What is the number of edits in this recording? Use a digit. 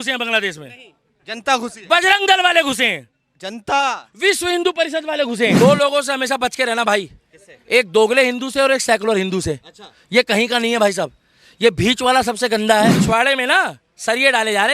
2